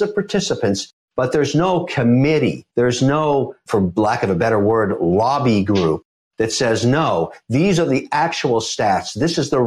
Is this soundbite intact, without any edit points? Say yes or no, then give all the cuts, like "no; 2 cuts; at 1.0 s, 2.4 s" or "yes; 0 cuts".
yes; 0 cuts